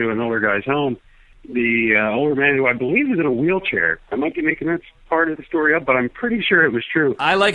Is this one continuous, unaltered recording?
yes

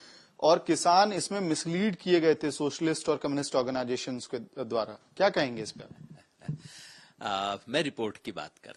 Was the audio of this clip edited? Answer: no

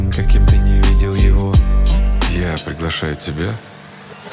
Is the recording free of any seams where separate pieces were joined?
yes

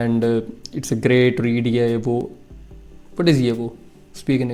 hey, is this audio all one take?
yes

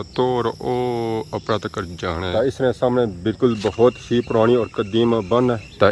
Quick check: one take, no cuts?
yes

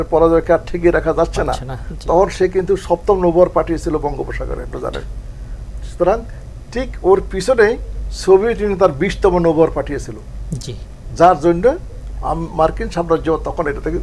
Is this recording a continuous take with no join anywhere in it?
yes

